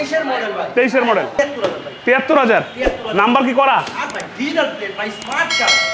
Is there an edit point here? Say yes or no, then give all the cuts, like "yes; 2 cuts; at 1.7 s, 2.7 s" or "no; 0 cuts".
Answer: yes; 1 cut; at 1.3 s